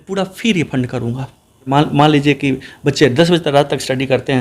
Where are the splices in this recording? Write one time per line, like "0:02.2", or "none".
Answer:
0:01.7